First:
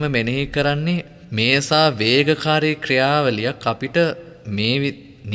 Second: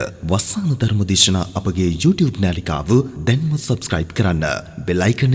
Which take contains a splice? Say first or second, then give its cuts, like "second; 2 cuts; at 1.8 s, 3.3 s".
first; 1 cut; at 1.2 s